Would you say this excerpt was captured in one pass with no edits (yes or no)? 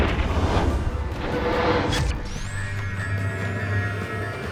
yes